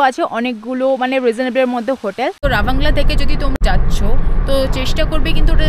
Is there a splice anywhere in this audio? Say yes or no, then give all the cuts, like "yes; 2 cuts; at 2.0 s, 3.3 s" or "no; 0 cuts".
yes; 2 cuts; at 2.4 s, 3.6 s